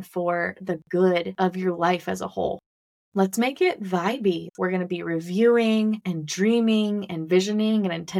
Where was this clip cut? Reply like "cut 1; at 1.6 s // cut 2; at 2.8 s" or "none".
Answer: cut 1; at 1.3 s // cut 2; at 4.5 s // cut 3; at 6.1 s

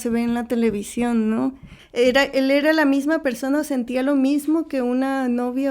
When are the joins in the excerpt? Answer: cut 1; at 1.8 s

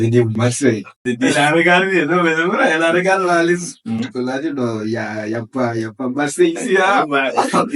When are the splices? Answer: cut 1; at 1.0 s

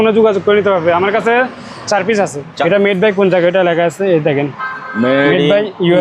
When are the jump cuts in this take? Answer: cut 1; at 2.5 s

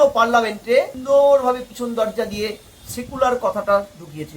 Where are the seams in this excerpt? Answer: cut 1; at 1.0 s

